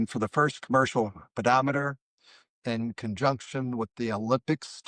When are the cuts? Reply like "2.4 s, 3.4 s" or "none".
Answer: none